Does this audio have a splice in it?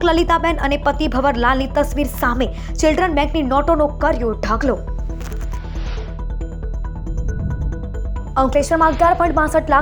no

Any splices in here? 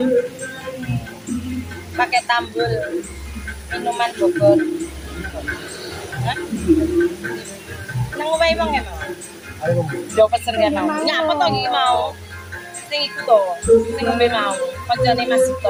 no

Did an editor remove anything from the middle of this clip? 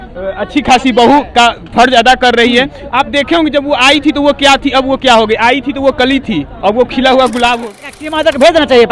yes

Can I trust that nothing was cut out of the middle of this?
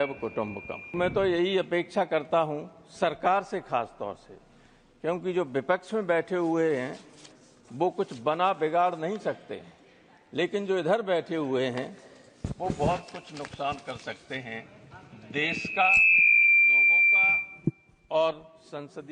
no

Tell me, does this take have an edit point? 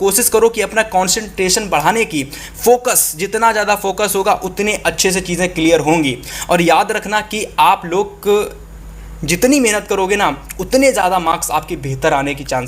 no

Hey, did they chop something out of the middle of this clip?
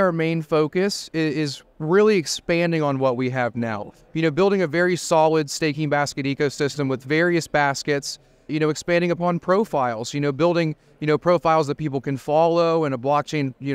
yes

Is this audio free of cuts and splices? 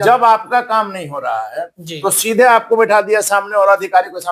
yes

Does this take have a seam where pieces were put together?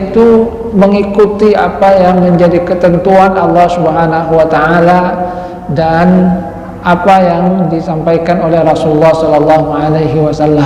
no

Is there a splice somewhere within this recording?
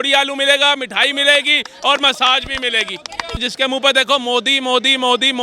yes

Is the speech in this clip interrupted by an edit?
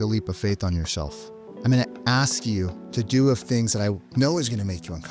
yes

